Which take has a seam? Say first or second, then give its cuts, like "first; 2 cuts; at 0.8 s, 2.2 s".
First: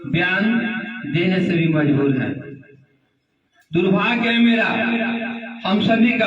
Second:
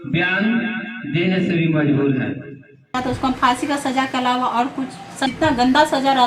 second; 2 cuts; at 2.9 s, 5.3 s